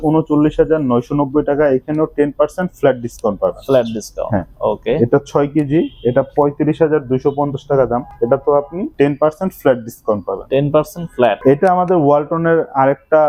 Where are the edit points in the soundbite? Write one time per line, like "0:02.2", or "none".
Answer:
none